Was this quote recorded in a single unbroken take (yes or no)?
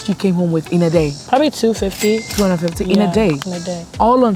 yes